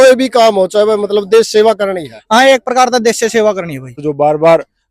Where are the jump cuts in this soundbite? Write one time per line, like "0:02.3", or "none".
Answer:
0:04.0